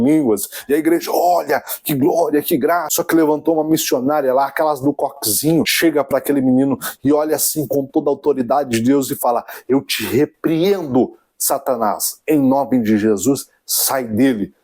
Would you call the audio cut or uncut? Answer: cut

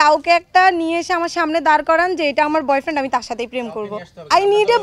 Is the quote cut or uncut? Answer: uncut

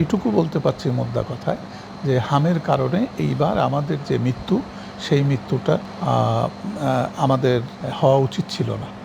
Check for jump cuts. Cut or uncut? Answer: uncut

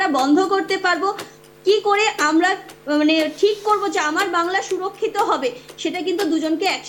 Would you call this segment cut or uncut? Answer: uncut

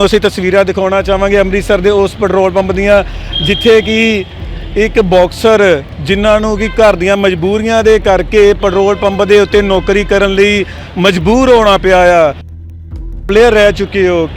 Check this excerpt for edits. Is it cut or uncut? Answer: cut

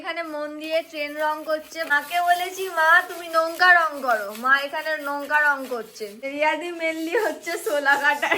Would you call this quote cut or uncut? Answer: cut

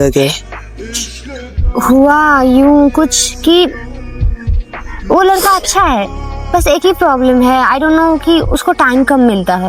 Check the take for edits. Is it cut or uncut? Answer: uncut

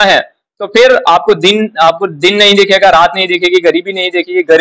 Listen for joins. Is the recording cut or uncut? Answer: uncut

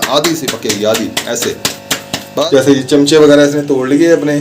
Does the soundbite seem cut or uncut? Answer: cut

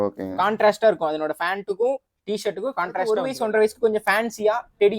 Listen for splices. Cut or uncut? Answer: cut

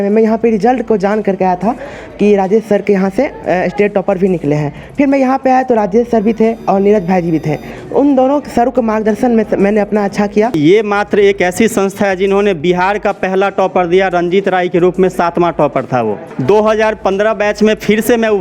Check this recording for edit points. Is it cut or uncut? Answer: cut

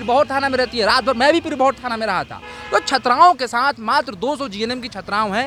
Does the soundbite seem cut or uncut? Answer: uncut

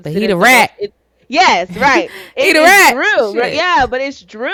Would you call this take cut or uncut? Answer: uncut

